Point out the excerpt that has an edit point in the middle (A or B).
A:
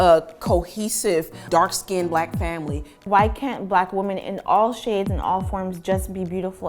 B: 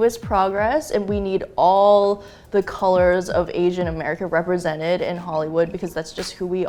A